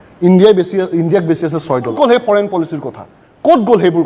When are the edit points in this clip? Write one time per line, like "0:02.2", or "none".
0:01.9